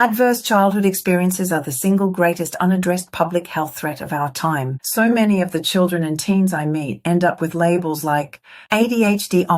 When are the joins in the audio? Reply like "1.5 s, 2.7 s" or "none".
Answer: 4.8 s